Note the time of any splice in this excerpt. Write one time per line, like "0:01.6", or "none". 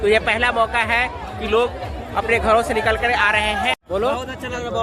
0:03.7